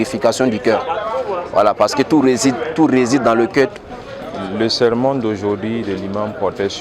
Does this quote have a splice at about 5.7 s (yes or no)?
no